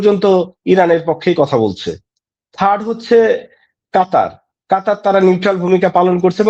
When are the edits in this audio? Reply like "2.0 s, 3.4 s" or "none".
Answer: none